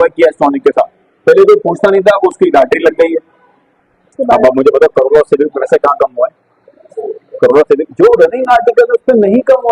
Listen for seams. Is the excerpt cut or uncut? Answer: cut